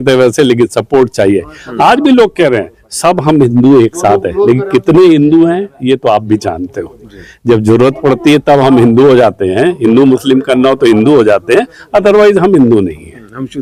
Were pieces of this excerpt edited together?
no; 0 cuts

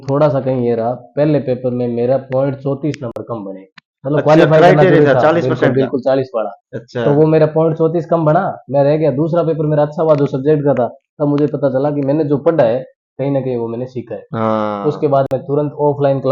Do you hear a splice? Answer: no; 0 cuts

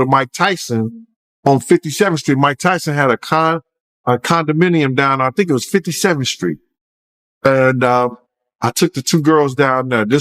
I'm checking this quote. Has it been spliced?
no; 0 cuts

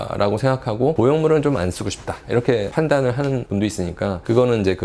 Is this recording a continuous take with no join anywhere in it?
yes; 0 cuts

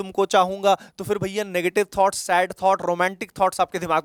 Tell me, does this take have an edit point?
no; 0 cuts

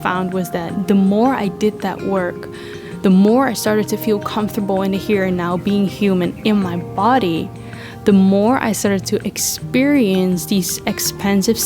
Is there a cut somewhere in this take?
no; 0 cuts

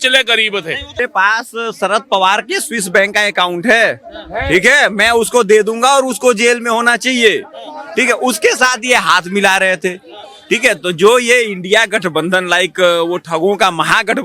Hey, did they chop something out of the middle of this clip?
yes; 1 cut; at 1.0 s

